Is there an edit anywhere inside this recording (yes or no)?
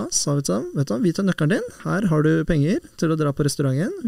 yes